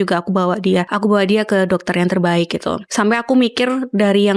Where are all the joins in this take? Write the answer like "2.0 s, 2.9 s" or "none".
0.9 s, 2.8 s